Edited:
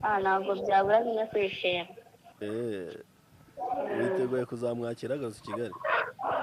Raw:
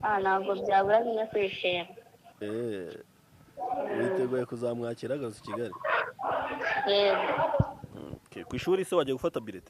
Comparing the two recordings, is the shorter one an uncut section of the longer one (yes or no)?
yes